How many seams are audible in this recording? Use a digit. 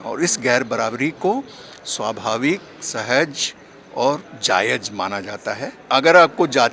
1